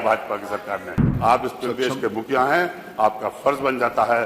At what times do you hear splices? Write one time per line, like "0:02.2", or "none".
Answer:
0:01.0